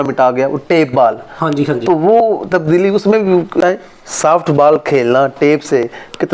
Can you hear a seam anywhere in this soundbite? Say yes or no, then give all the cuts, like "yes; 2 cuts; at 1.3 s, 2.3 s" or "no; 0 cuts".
yes; 1 cut; at 3.6 s